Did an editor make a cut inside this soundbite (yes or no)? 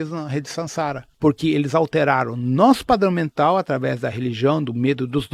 no